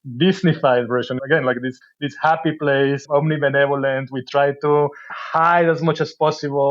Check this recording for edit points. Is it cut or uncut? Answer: cut